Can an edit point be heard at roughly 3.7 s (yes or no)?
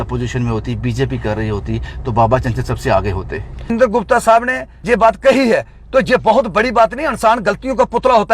yes